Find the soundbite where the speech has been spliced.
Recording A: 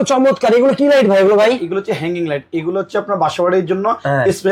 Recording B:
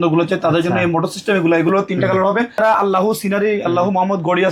B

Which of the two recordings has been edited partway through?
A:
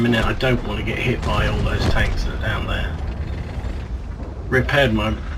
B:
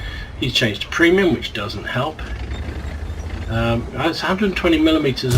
B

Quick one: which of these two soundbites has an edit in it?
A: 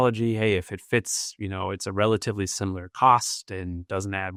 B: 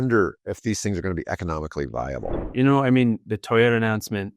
B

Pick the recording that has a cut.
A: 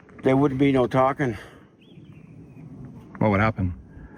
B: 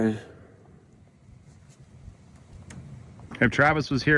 B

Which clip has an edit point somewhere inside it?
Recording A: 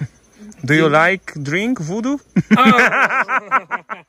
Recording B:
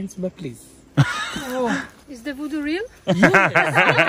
B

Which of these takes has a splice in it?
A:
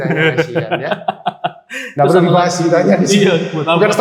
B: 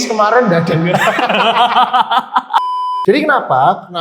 B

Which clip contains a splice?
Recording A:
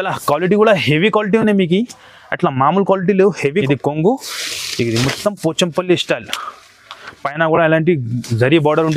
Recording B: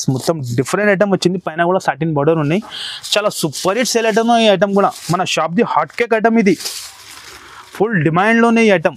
A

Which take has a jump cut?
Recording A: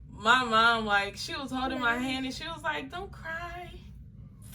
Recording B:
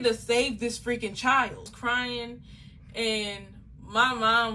B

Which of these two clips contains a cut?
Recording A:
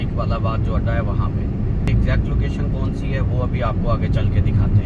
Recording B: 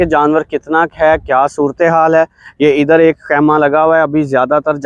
A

